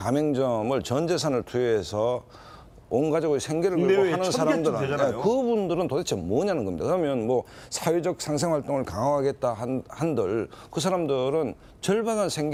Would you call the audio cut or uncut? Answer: uncut